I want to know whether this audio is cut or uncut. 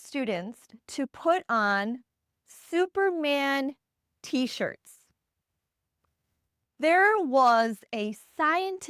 uncut